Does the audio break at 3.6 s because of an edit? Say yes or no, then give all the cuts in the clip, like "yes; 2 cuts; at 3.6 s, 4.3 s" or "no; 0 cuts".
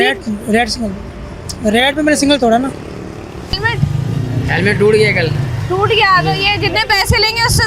yes; 1 cut; at 3.6 s